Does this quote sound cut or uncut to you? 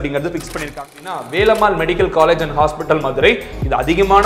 cut